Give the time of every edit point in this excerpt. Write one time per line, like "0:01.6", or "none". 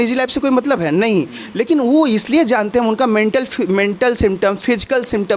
none